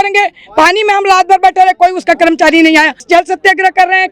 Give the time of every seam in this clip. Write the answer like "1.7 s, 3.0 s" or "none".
3.0 s